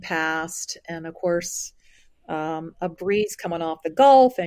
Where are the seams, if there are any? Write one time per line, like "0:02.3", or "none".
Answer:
none

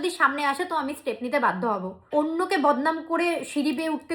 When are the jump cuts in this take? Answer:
0:02.1

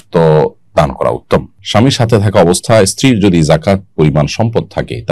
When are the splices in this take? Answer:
0:01.6

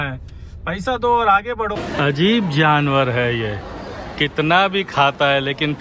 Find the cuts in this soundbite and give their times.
0:01.7

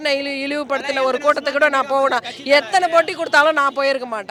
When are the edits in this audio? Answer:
none

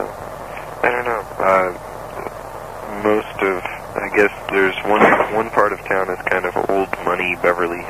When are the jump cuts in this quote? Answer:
none

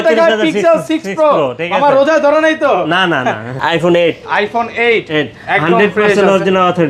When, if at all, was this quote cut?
0:03.5

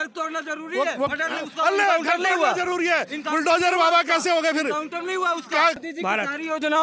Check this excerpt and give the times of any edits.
0:05.8

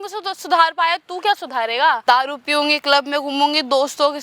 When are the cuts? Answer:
0:02.0

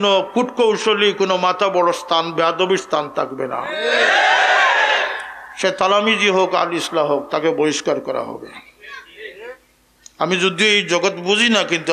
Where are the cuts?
none

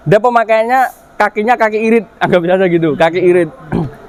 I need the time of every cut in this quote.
none

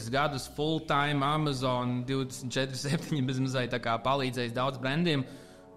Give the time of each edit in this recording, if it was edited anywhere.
none

